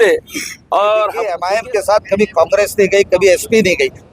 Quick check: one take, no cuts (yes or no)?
no